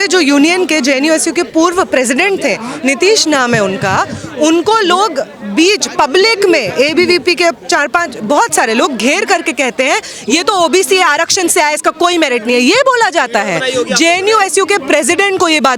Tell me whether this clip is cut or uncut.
uncut